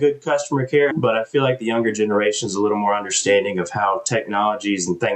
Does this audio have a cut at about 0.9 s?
yes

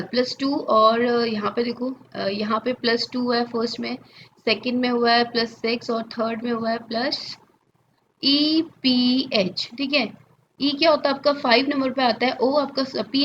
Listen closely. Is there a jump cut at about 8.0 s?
yes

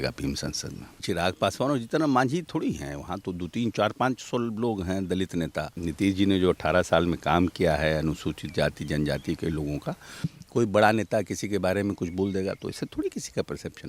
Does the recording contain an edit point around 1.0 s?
yes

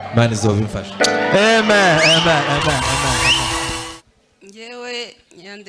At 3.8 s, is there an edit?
yes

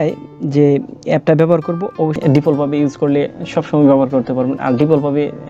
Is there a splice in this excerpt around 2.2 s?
yes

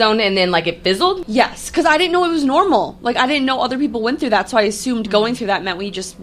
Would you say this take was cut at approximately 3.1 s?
no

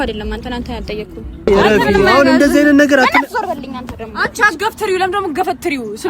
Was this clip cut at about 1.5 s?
yes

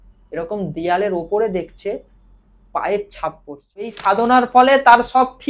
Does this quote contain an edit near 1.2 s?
no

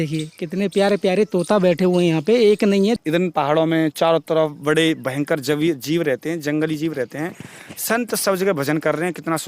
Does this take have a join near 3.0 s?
yes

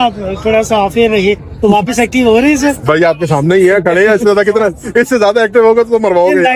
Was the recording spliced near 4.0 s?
no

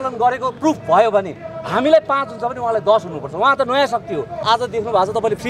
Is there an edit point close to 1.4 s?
no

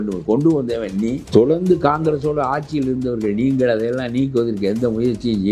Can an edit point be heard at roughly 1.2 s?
yes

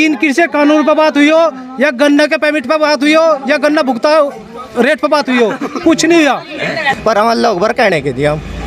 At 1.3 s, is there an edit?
no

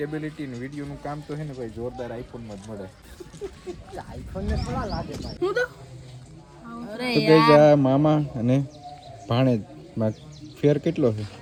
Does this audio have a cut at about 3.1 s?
no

